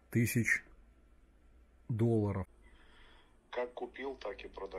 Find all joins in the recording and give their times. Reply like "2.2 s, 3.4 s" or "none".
2.5 s